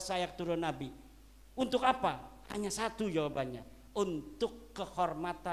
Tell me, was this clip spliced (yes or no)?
no